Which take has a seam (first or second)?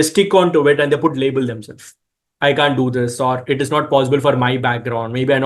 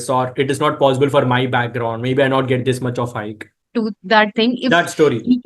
second